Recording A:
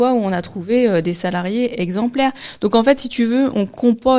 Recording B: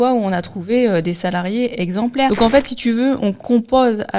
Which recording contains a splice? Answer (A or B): B